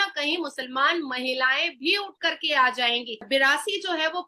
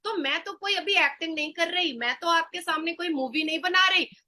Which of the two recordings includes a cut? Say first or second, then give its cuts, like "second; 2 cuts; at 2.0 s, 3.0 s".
first; 1 cut; at 3.3 s